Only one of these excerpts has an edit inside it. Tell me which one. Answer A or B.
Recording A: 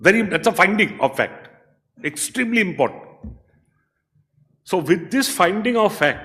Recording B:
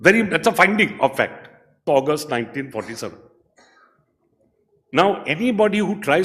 B